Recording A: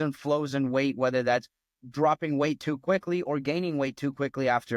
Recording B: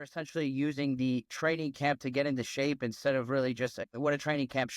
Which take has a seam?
B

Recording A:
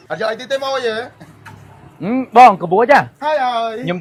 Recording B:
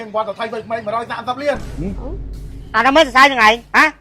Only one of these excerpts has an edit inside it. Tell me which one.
B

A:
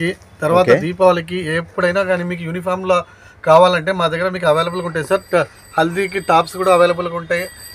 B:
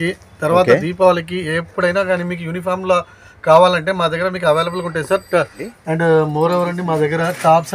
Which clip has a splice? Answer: B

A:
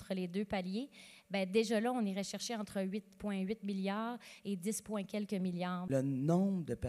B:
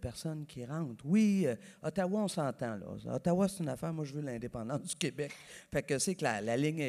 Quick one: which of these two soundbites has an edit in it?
A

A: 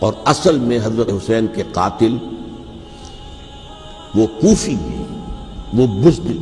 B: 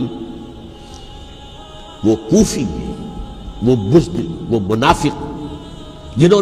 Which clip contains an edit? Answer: A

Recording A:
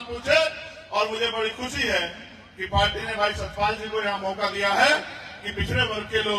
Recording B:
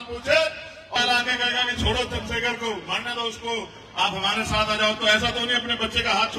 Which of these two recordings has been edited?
B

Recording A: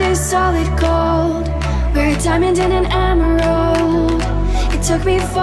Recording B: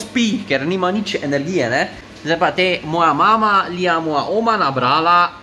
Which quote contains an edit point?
B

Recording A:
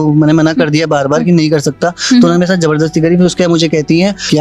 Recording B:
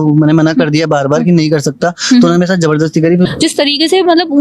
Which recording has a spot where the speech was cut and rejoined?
B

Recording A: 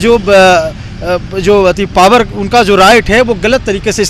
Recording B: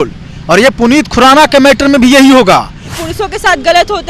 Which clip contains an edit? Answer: B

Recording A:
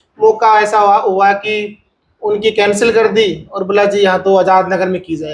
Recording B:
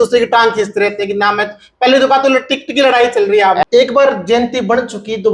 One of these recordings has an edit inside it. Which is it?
B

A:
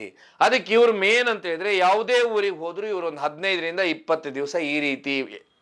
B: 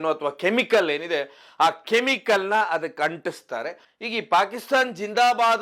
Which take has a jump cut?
B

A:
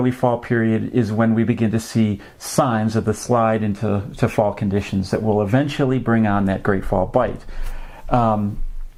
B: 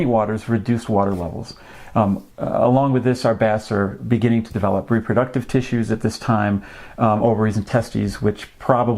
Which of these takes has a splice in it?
B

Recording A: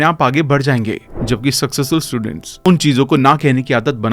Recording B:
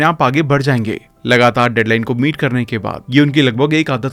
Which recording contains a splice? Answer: A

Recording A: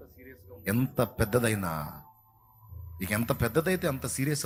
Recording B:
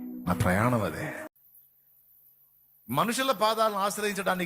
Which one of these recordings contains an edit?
B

